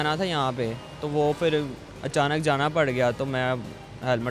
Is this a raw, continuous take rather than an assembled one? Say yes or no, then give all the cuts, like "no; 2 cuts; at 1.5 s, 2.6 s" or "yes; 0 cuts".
yes; 0 cuts